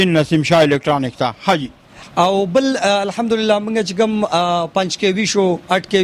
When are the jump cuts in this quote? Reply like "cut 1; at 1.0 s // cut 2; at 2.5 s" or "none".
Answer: none